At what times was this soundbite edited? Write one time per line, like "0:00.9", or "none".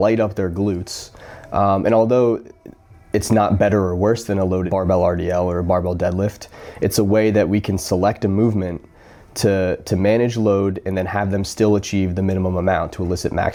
none

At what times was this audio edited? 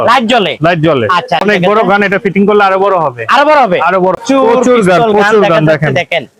0:01.4
0:04.2

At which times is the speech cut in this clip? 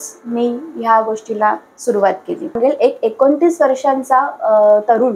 0:02.6

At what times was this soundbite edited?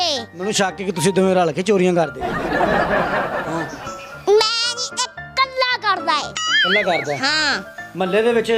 none

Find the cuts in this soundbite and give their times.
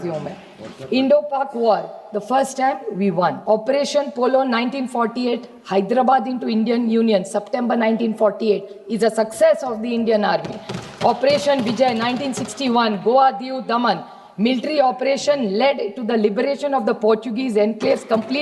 0:03.4

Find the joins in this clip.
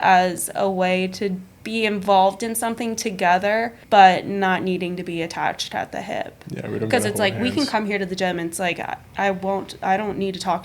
0:01.5
0:03.8

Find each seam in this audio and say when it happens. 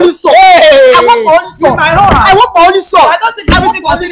none

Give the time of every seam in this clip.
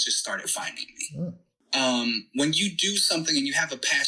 0:01.5

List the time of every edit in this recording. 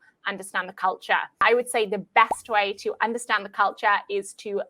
0:01.4

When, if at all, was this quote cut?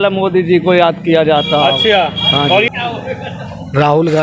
0:02.7

